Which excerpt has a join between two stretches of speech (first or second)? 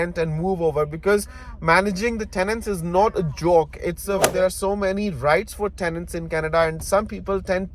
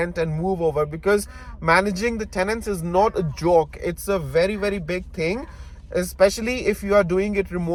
first